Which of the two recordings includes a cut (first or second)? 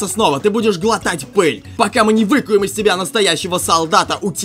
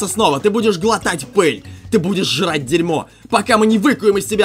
first